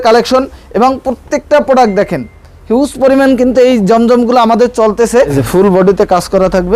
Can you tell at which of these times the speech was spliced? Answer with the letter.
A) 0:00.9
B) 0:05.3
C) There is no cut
B